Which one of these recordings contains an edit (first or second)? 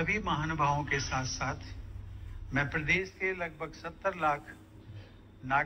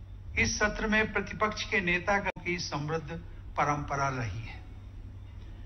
second